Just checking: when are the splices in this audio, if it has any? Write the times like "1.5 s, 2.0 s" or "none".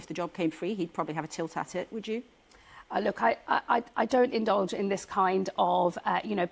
none